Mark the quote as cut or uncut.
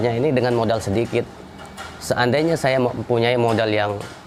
uncut